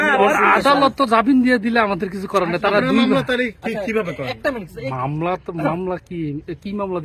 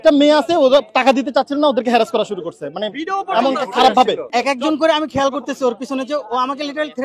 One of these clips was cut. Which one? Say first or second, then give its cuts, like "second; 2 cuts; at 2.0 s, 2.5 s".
second; 1 cut; at 4.3 s